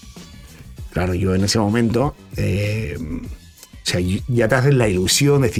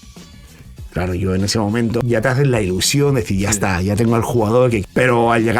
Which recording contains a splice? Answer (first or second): second